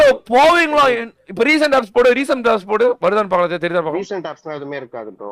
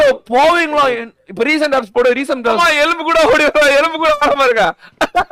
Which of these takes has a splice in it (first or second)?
second